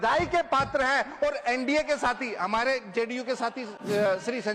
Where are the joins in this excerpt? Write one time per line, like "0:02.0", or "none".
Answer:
none